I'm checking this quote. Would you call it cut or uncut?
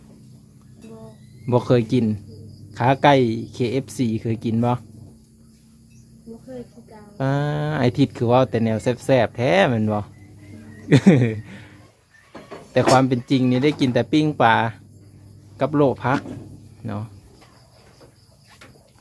uncut